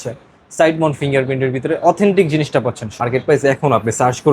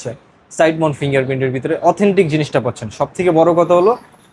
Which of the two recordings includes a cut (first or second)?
first